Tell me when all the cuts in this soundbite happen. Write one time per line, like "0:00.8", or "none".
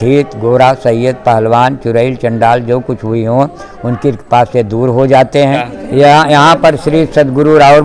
0:05.8